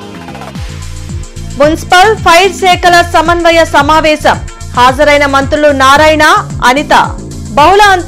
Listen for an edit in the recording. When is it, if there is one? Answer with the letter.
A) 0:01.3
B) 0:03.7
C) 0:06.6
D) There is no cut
A